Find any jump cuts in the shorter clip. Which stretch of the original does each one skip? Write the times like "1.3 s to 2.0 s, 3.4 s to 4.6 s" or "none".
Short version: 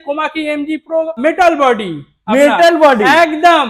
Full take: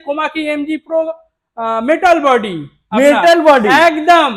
1.2 s to 1.8 s